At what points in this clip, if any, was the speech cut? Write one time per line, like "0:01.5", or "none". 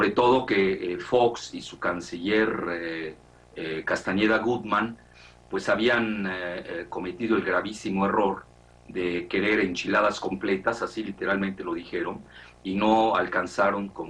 0:03.5